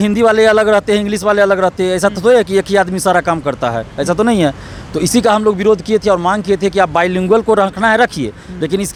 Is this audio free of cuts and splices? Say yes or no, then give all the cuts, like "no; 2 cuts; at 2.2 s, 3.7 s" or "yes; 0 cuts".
yes; 0 cuts